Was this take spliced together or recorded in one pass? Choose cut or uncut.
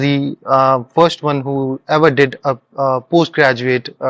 uncut